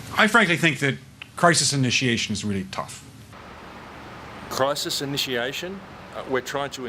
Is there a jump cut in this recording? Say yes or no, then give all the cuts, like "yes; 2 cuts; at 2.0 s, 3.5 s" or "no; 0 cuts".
no; 0 cuts